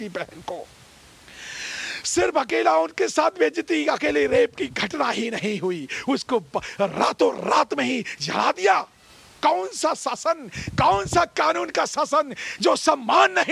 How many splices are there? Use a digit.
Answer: 0